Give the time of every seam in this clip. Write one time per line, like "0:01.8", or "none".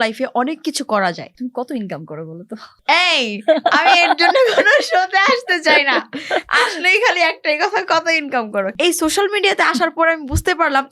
0:01.4
0:08.7